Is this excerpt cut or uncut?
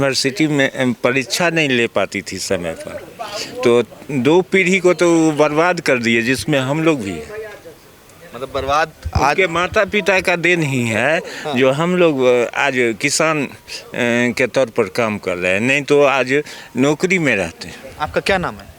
uncut